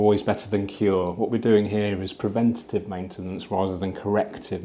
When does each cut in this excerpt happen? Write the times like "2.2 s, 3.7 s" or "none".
none